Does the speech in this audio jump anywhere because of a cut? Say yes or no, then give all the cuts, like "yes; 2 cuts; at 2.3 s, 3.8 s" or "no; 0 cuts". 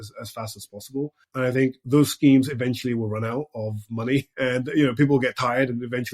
yes; 2 cuts; at 1.2 s, 4.3 s